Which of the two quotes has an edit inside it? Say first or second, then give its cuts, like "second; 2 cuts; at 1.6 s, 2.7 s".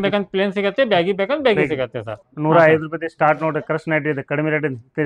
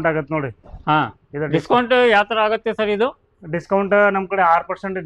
first; 1 cut; at 2.2 s